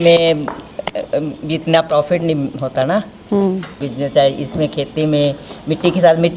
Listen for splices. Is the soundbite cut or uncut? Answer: uncut